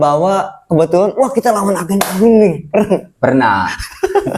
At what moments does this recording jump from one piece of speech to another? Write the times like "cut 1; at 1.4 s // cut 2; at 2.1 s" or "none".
none